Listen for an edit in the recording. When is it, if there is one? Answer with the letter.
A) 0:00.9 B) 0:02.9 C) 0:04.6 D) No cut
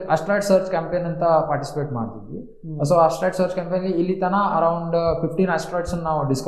D